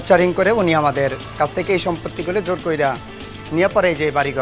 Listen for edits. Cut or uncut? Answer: uncut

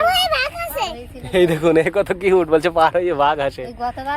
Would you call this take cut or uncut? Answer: uncut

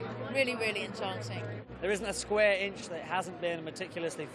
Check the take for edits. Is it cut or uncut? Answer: cut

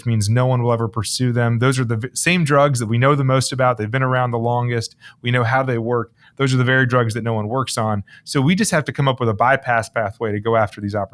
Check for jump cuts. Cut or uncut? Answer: uncut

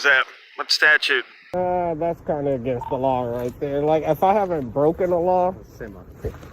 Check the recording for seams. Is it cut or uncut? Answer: cut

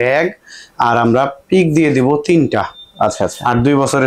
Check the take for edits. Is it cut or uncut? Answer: uncut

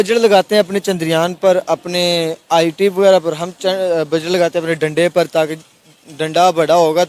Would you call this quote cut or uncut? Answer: uncut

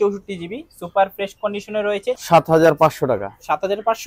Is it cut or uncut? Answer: cut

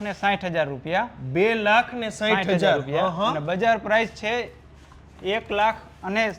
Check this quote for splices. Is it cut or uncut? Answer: uncut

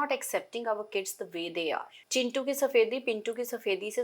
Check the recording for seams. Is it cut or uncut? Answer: cut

